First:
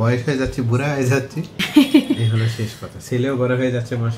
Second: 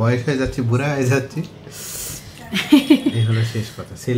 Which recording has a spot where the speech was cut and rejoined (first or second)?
first